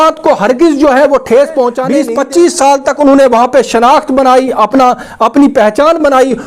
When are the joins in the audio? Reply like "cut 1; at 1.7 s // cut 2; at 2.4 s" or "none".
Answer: cut 1; at 1.9 s